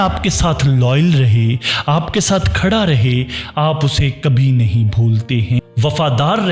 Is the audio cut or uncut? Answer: cut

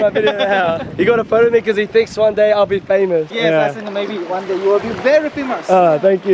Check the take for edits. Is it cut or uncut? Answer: cut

